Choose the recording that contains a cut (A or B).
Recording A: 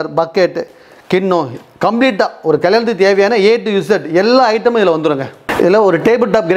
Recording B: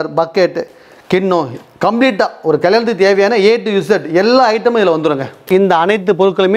B